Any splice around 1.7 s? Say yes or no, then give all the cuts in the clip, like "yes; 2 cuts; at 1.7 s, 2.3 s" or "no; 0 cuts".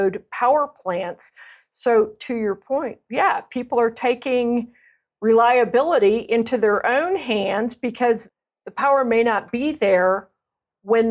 no; 1 cut; at 8.4 s